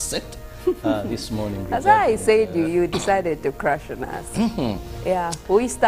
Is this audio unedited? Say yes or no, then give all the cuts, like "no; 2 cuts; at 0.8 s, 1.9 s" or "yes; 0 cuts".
no; 1 cut; at 2.8 s